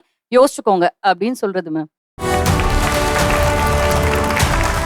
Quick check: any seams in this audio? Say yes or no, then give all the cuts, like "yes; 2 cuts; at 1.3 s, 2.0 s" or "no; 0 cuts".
yes; 1 cut; at 2.1 s